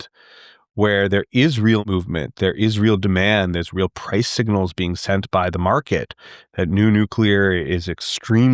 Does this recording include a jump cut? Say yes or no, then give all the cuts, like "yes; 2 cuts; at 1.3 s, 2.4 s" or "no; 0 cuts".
yes; 1 cut; at 1.8 s